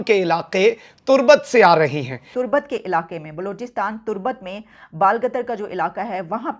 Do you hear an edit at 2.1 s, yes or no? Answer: yes